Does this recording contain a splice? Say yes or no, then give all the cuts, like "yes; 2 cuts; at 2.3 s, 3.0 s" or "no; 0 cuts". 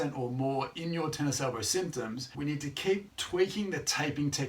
yes; 1 cut; at 3.1 s